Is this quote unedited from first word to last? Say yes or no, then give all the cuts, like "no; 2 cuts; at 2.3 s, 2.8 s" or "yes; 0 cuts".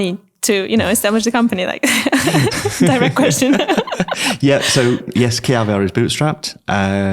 yes; 0 cuts